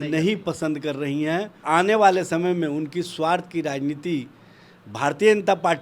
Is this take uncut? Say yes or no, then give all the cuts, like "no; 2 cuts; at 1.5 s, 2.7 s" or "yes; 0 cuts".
no; 1 cut; at 1.6 s